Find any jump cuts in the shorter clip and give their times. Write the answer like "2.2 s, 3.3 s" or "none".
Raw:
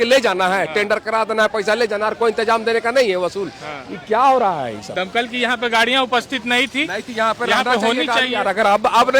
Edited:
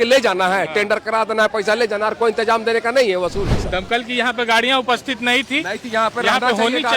3.6 s